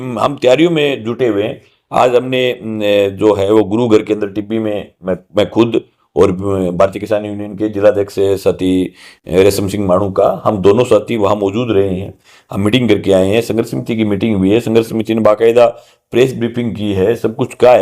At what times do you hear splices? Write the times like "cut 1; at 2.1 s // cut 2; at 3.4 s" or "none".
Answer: none